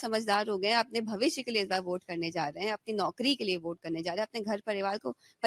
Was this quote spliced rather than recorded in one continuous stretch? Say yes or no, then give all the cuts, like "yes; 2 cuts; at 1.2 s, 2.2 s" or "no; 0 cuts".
no; 0 cuts